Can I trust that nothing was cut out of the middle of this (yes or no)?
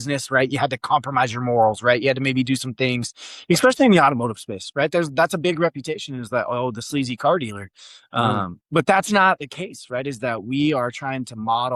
yes